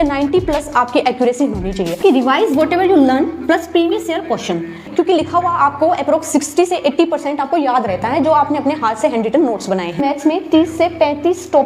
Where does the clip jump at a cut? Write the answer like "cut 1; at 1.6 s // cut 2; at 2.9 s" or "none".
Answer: cut 1; at 2.0 s // cut 2; at 4.8 s // cut 3; at 10.0 s

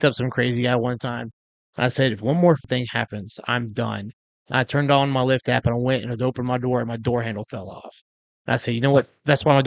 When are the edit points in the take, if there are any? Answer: cut 1; at 2.6 s

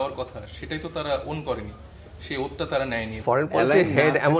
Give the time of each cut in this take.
cut 1; at 3.2 s

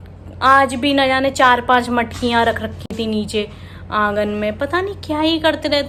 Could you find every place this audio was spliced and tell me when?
none

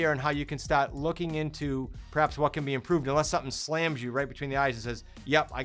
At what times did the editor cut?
none

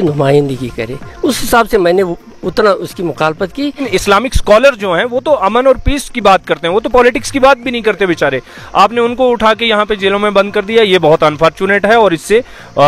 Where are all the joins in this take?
cut 1; at 3.8 s

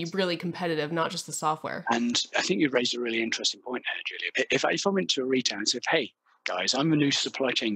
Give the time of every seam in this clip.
cut 1; at 4.2 s

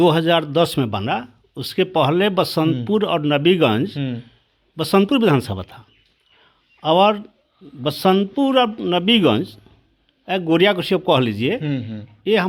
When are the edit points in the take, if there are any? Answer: none

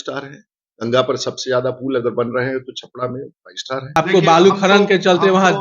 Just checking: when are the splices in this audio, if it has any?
cut 1; at 4.0 s

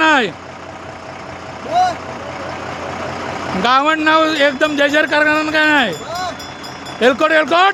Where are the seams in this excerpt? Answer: none

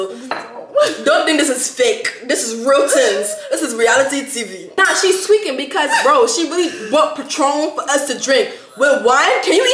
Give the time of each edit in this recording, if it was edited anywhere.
cut 1; at 4.8 s

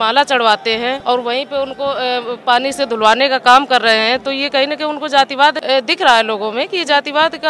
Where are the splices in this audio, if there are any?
cut 1; at 1.0 s // cut 2; at 5.6 s

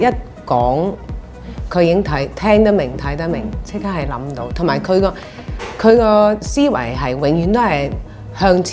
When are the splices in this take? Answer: cut 1; at 4.4 s

